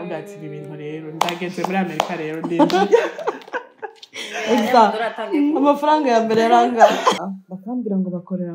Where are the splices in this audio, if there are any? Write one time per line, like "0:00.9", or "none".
0:07.2